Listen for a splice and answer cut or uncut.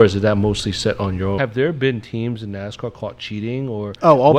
cut